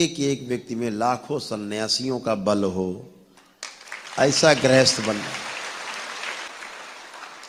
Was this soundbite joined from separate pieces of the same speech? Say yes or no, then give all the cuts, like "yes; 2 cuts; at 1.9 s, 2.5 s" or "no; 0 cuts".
no; 0 cuts